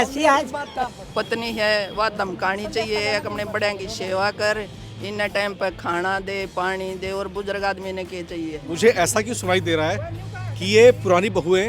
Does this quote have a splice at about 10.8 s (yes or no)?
no